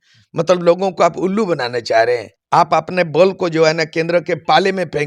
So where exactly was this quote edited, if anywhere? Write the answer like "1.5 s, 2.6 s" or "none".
2.3 s